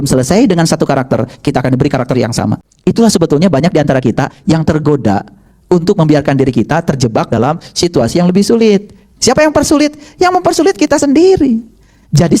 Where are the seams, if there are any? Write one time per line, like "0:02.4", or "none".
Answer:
0:02.7